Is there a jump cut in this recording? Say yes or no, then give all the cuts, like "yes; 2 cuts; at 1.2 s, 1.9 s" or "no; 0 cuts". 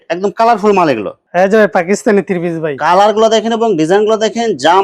yes; 1 cut; at 1.2 s